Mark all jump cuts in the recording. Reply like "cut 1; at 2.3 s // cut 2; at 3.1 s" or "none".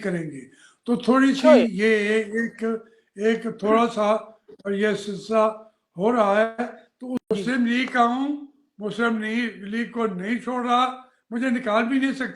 cut 1; at 7.2 s